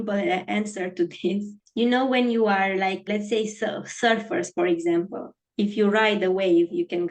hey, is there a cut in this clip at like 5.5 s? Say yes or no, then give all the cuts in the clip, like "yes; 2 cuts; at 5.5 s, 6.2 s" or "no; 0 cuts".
no; 2 cuts; at 1.6 s, 3.1 s